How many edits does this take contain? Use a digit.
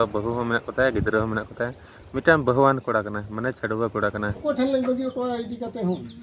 1